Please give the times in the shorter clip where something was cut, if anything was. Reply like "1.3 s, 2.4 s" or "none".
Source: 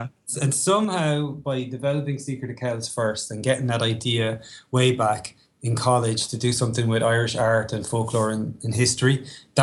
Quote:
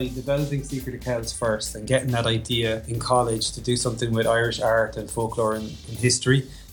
2.9 s